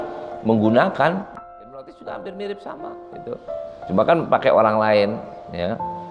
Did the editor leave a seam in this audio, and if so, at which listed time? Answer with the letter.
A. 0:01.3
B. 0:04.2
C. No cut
A